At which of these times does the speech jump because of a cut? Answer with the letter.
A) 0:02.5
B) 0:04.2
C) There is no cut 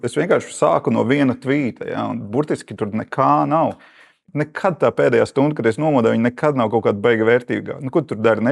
B